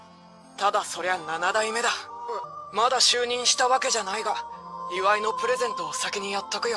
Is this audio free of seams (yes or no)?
no